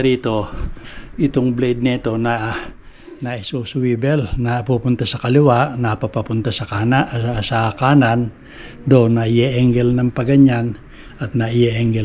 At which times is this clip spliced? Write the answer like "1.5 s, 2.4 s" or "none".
none